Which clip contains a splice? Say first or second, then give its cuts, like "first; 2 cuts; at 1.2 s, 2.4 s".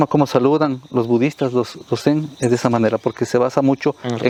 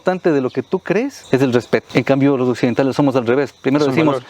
second; 2 cuts; at 1.2 s, 1.9 s